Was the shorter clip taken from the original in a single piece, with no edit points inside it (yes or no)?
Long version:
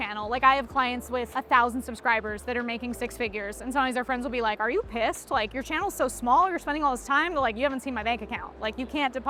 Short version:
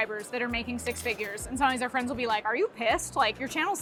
yes